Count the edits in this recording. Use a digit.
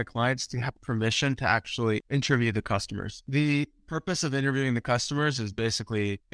2